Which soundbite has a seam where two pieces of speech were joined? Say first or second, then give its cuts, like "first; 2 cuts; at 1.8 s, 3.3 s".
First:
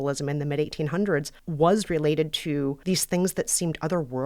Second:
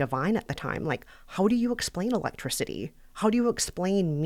first; 2 cuts; at 1.4 s, 2.8 s